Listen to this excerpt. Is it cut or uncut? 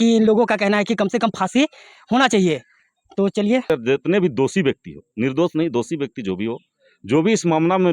cut